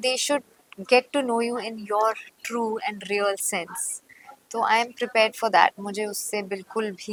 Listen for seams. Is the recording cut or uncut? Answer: uncut